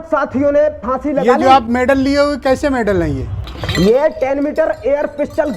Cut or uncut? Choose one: uncut